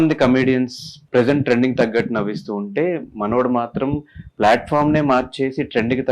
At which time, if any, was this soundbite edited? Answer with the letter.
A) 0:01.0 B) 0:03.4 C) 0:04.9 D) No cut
A